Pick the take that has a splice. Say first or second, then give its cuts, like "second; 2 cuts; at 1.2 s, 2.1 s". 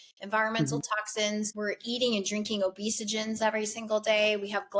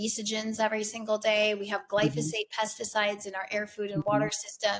first; 1 cut; at 1.5 s